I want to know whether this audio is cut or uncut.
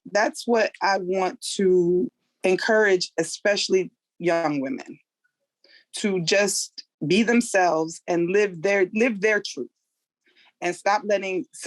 cut